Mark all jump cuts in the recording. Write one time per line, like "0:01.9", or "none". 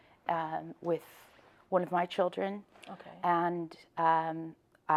none